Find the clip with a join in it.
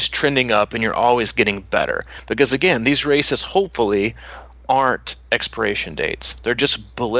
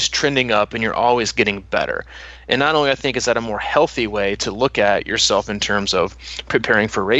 first; 1 cut; at 2.2 s

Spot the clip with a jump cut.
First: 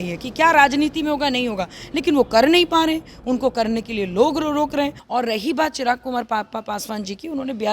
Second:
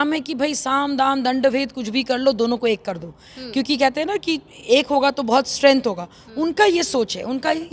first; 1 cut; at 5.0 s

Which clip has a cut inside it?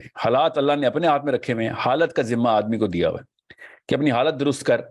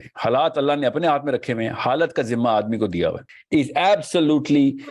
second; 1 cut; at 3.3 s

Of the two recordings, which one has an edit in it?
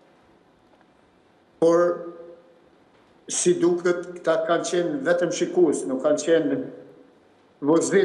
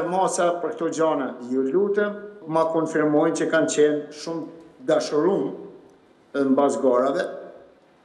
second; 1 cut; at 2.4 s

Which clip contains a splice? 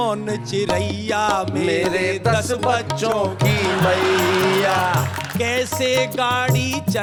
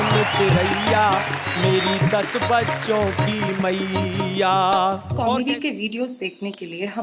second; 1 cut; at 5.1 s

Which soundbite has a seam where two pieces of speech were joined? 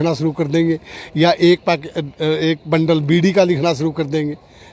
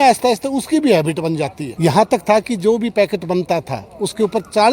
second; 1 cut; at 1.6 s

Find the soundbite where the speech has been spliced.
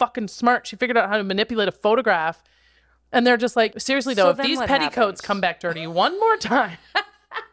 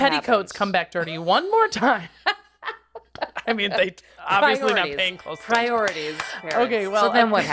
first; 1 cut; at 3.8 s

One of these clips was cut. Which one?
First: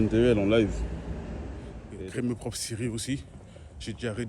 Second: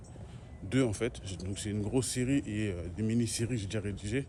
first; 1 cut; at 1.8 s

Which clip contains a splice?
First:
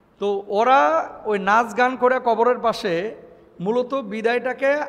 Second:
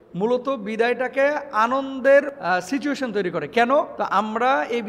second; 2 cuts; at 2.4 s, 3.9 s

